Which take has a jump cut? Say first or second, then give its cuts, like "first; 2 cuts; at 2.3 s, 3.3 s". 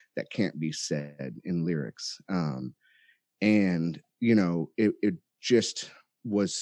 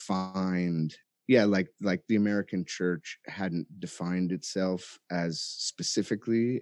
second; 1 cut; at 1.1 s